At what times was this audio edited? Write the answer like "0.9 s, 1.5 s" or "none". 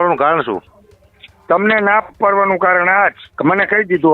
3.3 s